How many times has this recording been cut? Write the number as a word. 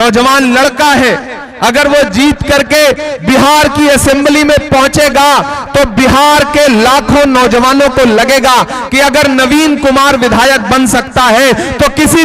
zero